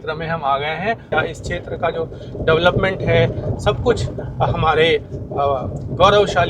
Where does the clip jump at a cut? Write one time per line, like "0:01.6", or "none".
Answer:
0:01.1